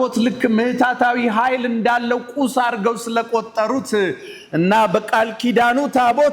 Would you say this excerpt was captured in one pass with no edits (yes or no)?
yes